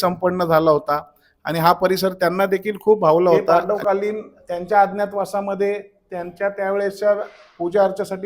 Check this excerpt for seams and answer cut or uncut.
cut